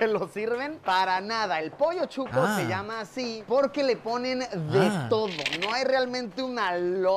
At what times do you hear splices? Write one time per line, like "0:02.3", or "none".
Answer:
0:03.6